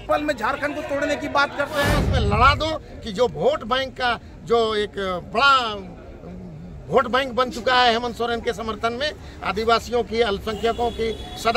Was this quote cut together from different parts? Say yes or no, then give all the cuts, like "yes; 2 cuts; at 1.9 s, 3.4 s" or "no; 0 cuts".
yes; 1 cut; at 1.9 s